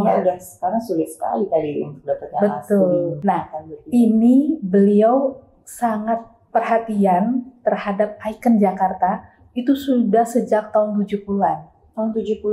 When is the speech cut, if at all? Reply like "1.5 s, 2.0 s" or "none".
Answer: 3.1 s